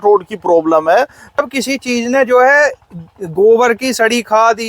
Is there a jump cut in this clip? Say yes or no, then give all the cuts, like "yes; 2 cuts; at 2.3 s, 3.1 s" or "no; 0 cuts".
yes; 1 cut; at 1.4 s